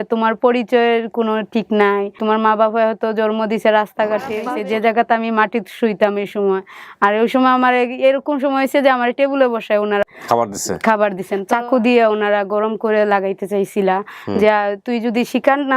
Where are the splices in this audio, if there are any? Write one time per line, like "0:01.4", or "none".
0:02.2
0:04.6
0:10.1
0:11.3